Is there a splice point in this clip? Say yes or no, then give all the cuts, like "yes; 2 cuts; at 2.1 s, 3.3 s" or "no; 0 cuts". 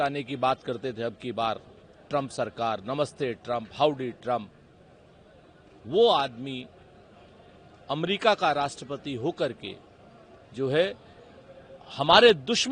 no; 0 cuts